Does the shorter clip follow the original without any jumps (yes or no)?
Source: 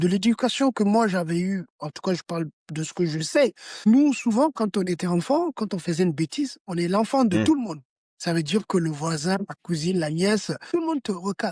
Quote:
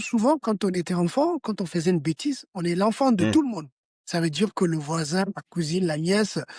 yes